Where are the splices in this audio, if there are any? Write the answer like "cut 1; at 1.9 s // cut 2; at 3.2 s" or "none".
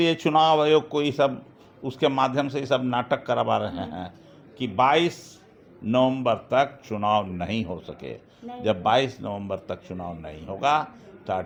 none